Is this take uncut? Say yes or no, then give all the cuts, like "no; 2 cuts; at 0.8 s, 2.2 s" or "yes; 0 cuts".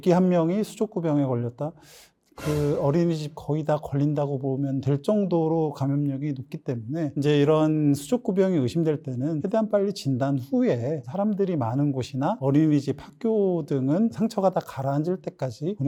yes; 0 cuts